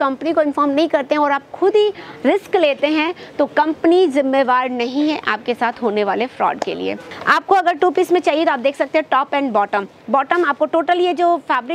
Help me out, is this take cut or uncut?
cut